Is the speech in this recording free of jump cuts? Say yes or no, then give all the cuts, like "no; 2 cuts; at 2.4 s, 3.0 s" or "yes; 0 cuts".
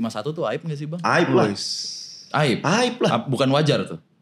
yes; 0 cuts